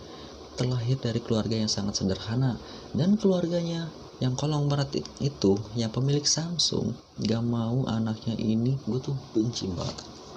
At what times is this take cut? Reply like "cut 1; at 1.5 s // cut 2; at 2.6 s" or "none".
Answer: cut 1; at 8.8 s